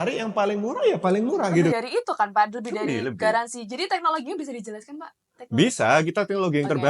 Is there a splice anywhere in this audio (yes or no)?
yes